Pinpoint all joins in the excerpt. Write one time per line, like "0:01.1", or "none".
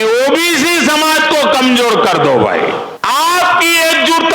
0:02.9